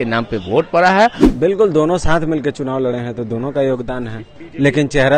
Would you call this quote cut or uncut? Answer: cut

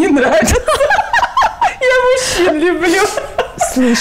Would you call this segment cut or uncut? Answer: uncut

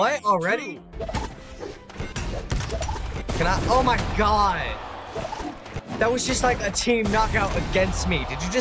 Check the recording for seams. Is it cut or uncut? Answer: cut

